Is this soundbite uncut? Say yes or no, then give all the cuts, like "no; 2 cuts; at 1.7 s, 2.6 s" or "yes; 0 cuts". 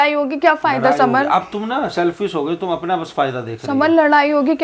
yes; 0 cuts